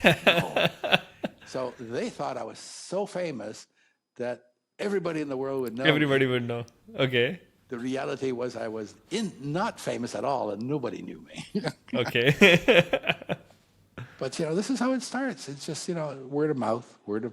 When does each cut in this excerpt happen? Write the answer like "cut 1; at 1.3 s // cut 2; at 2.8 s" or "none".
none